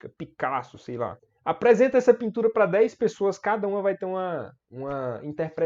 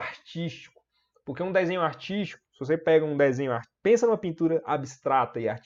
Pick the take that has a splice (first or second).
first